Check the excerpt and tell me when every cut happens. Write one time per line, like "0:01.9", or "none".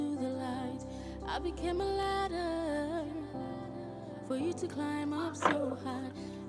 none